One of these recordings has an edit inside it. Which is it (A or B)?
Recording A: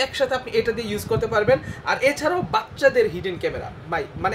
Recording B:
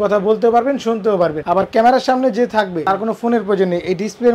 B